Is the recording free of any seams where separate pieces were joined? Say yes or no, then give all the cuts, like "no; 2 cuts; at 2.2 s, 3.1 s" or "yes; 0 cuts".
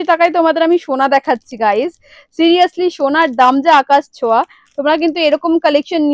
yes; 0 cuts